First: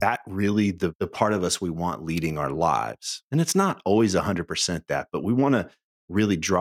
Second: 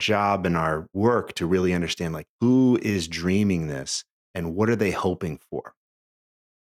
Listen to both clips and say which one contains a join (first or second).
second